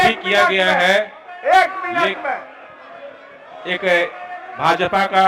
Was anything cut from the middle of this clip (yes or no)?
no